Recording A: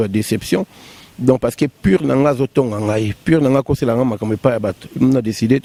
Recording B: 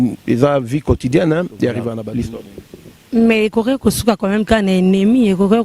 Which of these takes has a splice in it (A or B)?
B